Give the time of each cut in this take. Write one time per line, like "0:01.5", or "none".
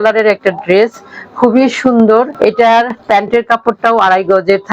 0:02.3